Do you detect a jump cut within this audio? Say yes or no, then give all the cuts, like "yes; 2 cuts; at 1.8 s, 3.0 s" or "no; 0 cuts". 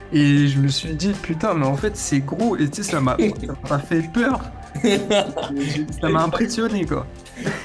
no; 0 cuts